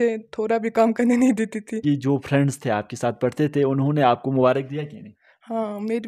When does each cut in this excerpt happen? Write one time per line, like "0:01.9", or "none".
0:01.8

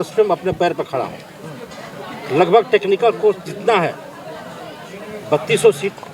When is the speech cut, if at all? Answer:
none

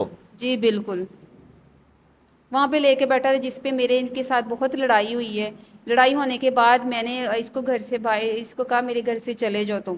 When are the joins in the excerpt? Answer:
none

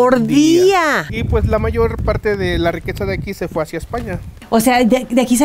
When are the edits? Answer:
0:01.1
0:04.3

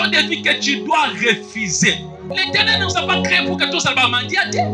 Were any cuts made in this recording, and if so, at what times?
0:02.2

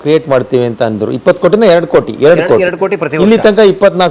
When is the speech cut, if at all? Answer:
none

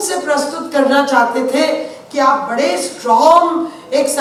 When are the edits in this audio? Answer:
none

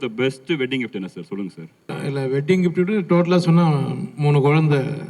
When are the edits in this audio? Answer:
0:01.9

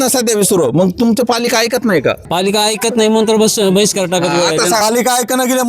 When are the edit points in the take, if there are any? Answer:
0:02.2
0:04.8

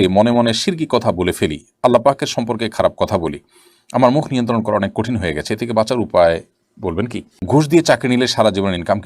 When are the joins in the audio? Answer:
0:07.5

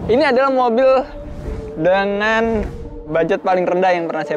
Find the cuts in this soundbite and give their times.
0:02.8

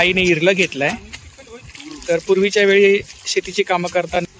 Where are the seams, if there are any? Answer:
none

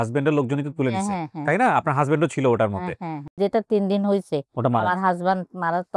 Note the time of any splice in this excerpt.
0:03.3

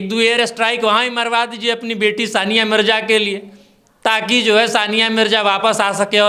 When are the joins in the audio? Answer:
none

